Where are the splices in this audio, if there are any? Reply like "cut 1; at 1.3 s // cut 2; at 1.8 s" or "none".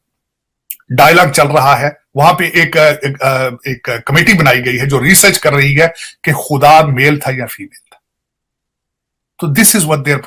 none

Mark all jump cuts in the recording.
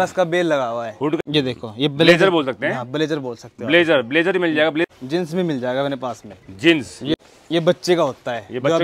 cut 1; at 1.2 s // cut 2; at 4.8 s // cut 3; at 7.1 s

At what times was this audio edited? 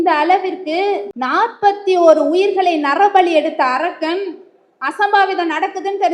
cut 1; at 1.1 s

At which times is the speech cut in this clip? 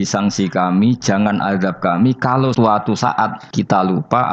cut 1; at 2.5 s // cut 2; at 3.4 s

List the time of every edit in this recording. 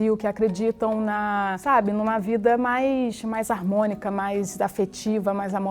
cut 1; at 1.6 s

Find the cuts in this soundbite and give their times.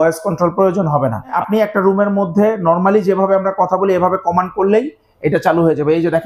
cut 1; at 1.3 s

